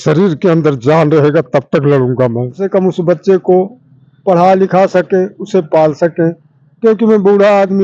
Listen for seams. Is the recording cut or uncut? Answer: cut